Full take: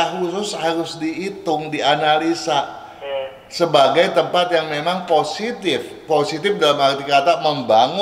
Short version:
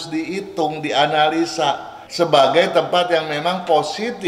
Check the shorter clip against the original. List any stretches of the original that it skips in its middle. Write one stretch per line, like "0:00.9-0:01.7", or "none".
0:02.9-0:03.4